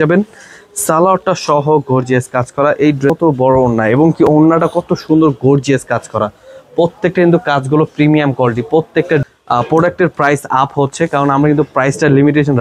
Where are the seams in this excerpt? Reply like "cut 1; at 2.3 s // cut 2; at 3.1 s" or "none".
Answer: cut 1; at 3.1 s // cut 2; at 9.2 s